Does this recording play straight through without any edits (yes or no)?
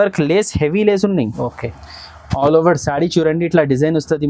yes